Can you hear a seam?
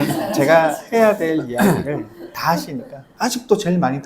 yes; 1 cut; at 3.0 s

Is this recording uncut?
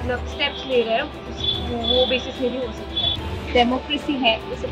no; 1 cut; at 3.1 s

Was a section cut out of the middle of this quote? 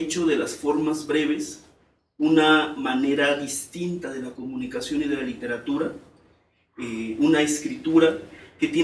no; 0 cuts

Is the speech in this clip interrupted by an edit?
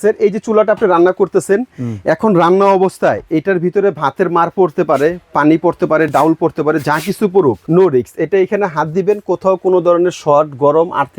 yes; 1 cut; at 7.6 s

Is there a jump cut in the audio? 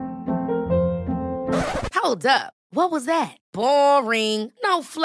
no; 0 cuts

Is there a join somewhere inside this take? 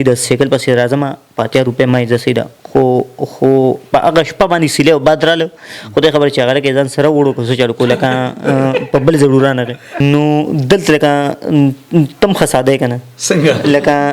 yes; 1 cut; at 10.0 s

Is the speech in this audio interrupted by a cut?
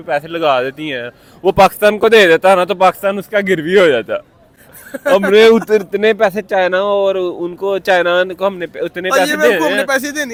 no; 0 cuts

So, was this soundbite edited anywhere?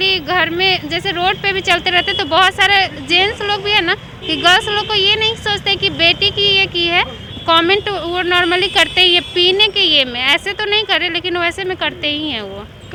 no; 0 cuts

